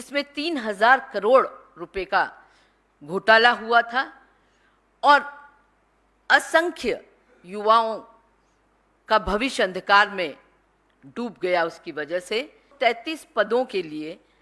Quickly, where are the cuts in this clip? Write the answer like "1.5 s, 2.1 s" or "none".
12.7 s